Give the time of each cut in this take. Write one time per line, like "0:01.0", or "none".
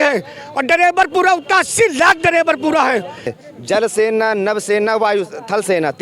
0:03.4